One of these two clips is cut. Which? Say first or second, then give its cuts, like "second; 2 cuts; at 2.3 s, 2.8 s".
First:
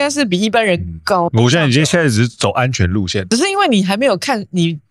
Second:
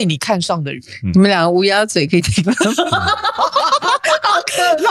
first; 2 cuts; at 1.3 s, 3.2 s